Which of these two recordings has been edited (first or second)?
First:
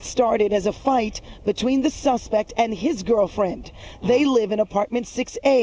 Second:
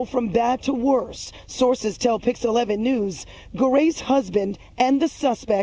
first